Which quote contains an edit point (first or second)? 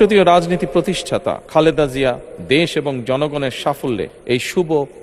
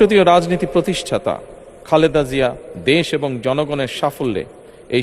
first